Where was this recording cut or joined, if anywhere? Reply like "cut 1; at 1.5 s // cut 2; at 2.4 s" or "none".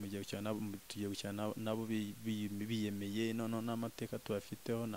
none